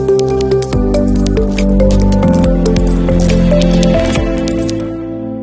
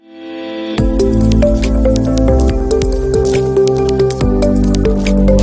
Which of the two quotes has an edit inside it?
second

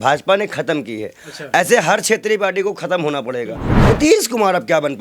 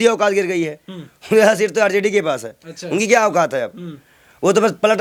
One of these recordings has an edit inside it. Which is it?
first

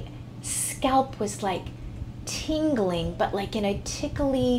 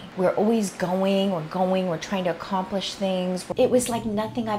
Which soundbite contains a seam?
second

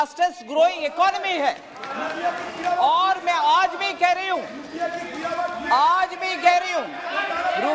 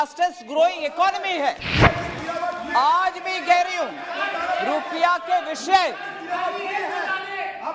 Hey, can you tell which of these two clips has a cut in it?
second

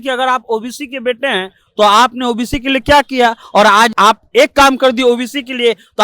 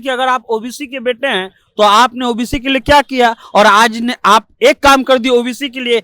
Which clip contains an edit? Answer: first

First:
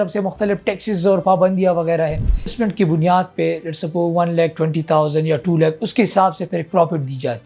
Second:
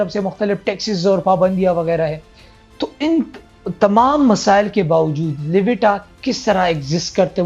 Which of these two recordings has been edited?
first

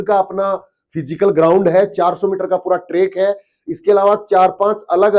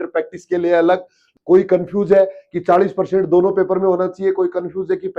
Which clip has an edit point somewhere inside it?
second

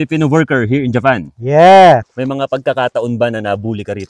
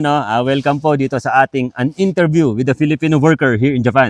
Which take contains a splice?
first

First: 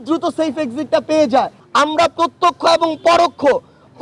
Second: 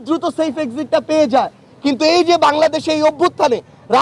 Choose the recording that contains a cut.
first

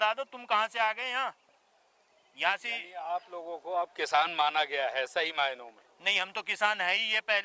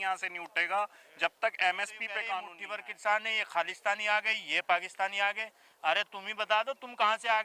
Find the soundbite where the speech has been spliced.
second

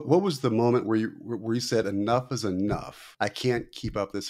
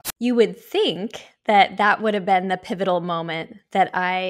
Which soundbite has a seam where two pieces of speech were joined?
first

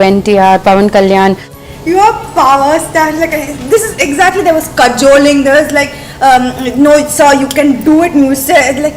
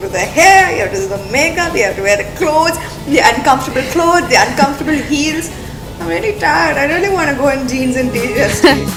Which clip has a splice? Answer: first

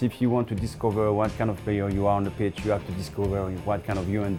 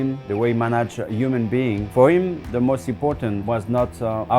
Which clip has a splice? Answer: second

